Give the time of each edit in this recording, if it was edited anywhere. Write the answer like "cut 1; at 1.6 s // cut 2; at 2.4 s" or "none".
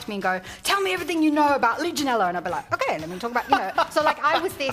none